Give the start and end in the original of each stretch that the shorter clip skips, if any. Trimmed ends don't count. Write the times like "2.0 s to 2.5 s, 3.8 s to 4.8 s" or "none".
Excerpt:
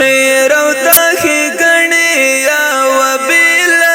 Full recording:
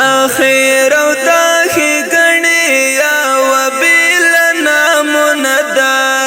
1.3 s to 1.5 s

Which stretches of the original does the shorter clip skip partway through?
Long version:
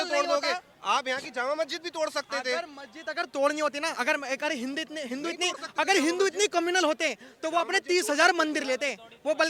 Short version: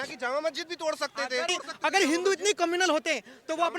2.6 s to 5.4 s

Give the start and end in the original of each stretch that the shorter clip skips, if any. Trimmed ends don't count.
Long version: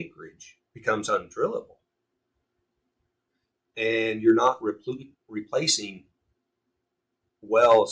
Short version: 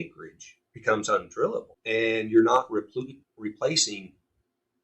1.8 s to 3.7 s

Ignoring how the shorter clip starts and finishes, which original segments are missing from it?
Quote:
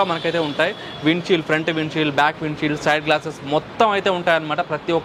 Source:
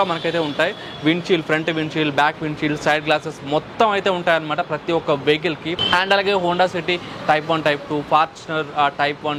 none

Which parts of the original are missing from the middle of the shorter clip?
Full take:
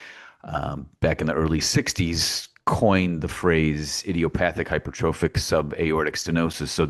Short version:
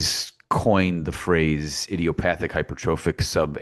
none

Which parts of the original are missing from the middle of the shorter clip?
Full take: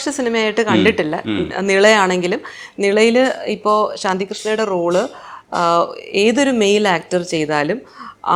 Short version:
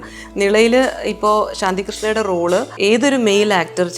5.1 s to 6.0 s

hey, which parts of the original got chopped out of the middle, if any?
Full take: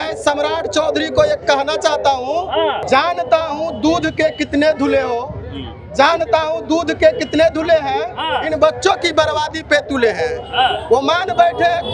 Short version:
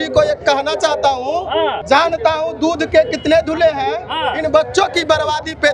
2.8 s to 5.9 s

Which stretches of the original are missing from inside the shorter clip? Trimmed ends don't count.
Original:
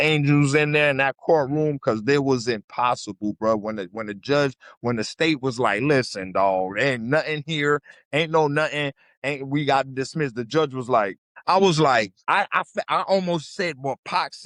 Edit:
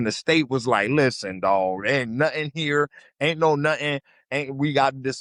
none

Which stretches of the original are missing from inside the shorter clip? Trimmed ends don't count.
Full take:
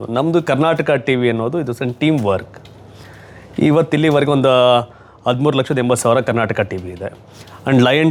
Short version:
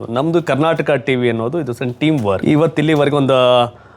2.4 s to 3.5 s

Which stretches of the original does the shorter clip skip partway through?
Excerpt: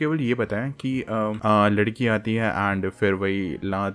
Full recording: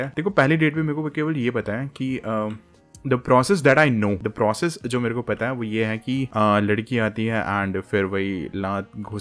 2.5 s to 6.3 s

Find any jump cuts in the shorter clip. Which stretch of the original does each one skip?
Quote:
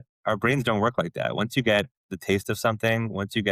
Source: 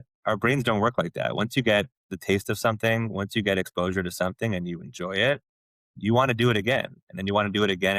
none

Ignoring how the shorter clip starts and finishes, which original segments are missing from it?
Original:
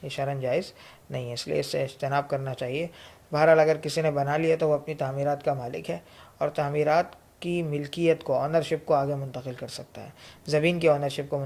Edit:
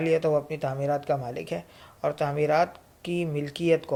none

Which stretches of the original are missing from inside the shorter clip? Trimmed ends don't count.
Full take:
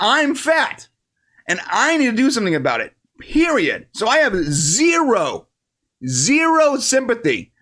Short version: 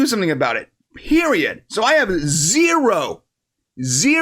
none

